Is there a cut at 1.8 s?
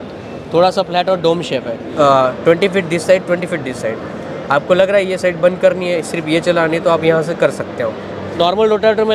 yes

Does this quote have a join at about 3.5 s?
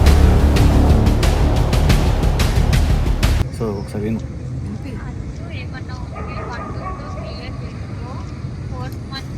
yes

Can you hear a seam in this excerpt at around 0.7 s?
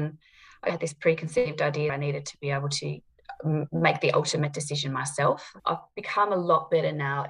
yes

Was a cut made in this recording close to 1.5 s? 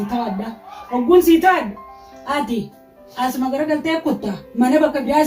no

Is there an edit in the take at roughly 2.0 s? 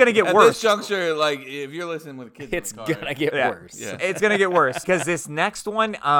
no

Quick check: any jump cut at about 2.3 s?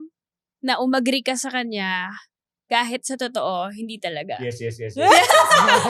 no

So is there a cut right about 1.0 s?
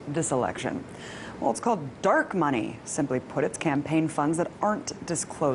no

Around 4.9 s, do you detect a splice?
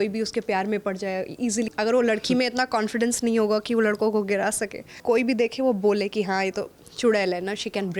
yes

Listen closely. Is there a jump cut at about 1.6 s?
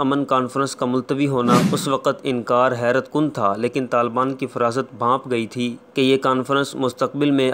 yes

